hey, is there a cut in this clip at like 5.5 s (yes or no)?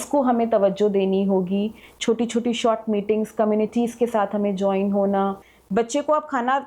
yes